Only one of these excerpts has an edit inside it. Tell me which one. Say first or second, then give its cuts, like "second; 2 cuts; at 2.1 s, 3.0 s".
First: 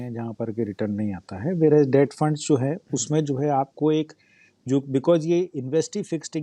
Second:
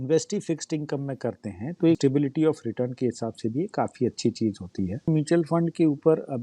second; 2 cuts; at 2.0 s, 5.1 s